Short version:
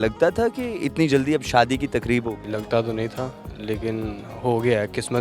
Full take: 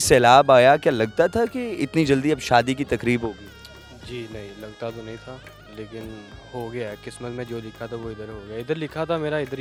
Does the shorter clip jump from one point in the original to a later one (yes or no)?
yes